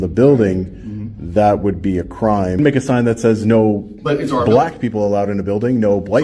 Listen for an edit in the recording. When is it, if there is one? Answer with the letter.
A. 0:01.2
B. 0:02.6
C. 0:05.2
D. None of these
B